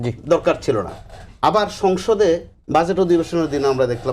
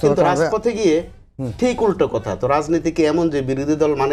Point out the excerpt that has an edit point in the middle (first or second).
first